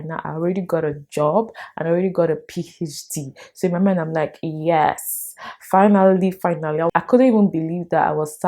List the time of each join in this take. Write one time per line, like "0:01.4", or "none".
0:06.9